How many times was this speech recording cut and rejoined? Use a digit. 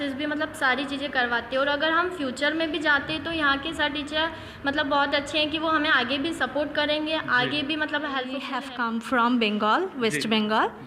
1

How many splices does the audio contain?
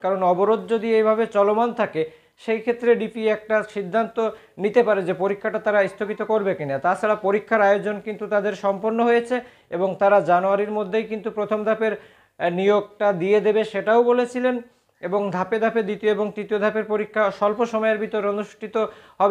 0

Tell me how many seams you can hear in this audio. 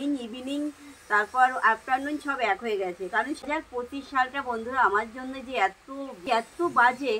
2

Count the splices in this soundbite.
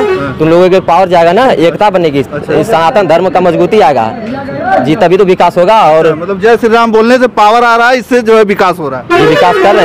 0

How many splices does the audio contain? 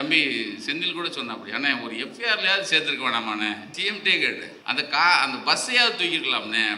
2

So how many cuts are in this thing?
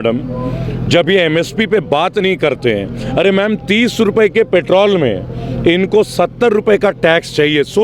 0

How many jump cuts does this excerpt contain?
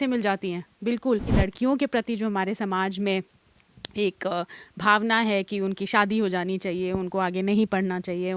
1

